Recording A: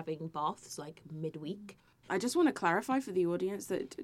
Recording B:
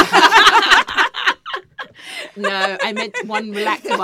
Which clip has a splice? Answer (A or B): A